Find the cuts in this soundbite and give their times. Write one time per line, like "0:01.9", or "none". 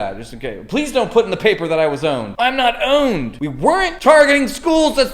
0:02.3
0:03.7